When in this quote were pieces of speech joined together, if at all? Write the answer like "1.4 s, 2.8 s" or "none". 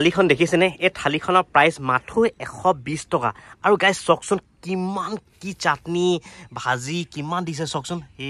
none